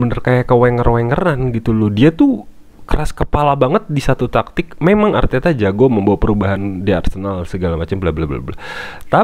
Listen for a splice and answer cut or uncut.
uncut